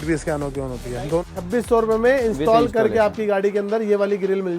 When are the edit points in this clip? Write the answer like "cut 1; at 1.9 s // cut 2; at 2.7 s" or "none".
cut 1; at 1.2 s